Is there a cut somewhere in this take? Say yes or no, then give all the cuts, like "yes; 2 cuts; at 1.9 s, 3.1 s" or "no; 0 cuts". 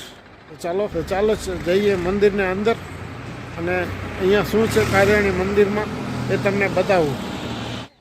yes; 1 cut; at 0.9 s